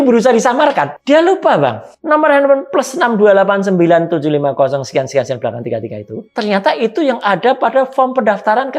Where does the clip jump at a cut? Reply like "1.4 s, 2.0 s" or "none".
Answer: 0.9 s, 1.9 s, 6.2 s